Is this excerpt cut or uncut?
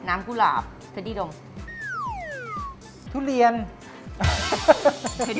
uncut